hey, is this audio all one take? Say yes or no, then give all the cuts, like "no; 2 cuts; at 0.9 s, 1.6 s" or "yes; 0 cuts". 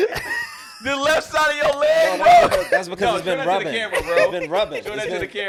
yes; 0 cuts